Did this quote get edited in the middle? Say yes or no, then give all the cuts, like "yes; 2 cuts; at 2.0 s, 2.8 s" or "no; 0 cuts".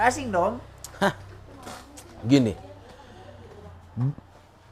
no; 0 cuts